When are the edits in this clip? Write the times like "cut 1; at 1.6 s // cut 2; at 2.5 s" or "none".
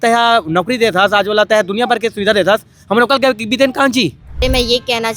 cut 1; at 4.2 s